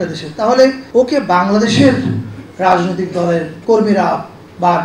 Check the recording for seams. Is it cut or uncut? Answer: cut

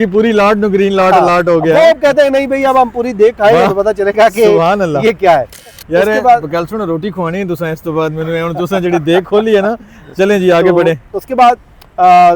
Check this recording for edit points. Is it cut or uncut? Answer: cut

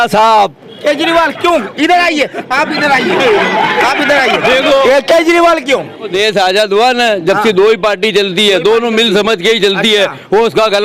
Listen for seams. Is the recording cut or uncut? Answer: cut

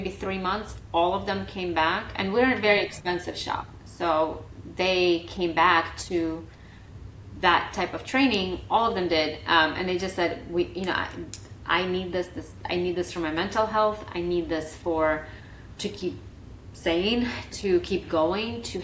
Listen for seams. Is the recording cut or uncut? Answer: uncut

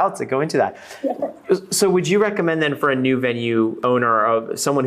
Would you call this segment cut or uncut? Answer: cut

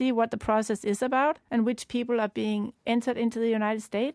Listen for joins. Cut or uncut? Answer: cut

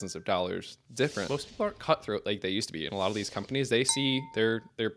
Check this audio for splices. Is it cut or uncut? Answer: cut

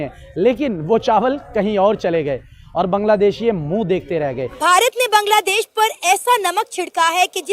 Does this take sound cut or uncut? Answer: cut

